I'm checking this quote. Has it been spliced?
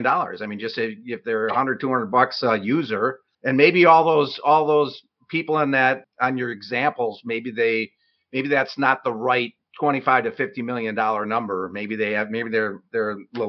yes; 1 cut; at 6.0 s

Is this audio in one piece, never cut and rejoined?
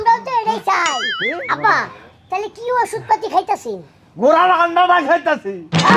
no; 1 cut; at 1.0 s

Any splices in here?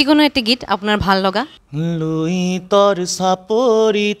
yes; 1 cut; at 1.6 s

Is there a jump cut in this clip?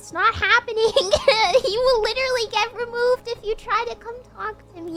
no; 0 cuts

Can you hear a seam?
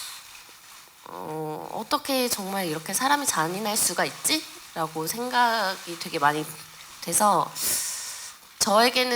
no; 0 cuts

